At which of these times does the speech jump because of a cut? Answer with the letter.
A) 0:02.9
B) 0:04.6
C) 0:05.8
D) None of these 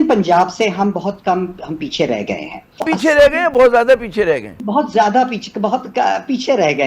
A